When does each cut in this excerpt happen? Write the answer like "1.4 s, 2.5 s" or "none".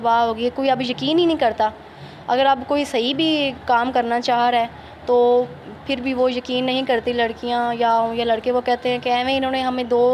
none